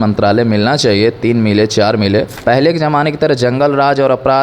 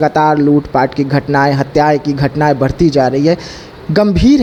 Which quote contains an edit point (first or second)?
first